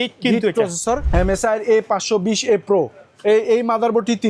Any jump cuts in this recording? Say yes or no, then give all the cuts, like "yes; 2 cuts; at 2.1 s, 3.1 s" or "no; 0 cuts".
yes; 1 cut; at 1.1 s